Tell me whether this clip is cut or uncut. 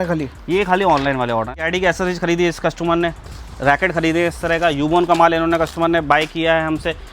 cut